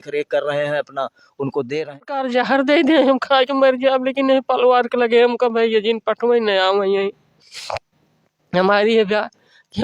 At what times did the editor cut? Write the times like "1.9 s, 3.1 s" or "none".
2.2 s